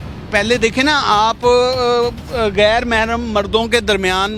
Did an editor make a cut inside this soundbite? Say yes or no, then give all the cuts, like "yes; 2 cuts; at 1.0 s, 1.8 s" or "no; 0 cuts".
no; 0 cuts